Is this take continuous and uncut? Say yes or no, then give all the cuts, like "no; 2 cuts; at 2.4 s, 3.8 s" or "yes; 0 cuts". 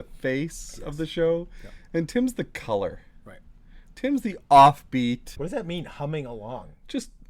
no; 1 cut; at 5.3 s